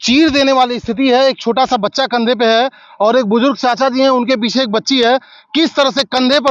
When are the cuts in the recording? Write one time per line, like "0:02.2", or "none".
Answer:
none